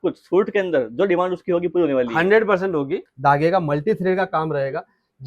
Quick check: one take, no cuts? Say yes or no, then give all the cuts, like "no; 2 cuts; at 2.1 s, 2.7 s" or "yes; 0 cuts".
no; 1 cut; at 3.0 s